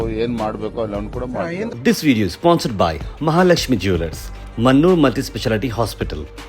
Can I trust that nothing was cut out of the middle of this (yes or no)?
no